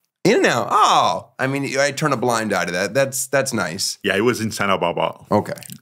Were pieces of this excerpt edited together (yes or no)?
yes